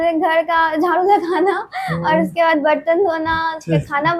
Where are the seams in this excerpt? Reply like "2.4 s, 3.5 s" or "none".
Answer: none